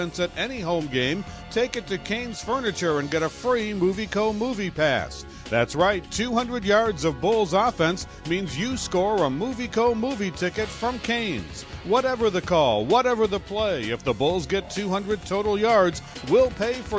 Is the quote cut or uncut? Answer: uncut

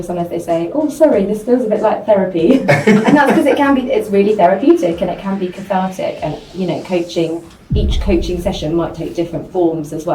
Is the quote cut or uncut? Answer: uncut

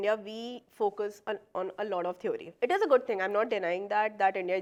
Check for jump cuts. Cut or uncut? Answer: uncut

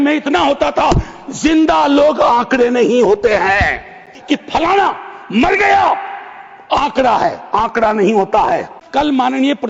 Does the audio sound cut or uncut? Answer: cut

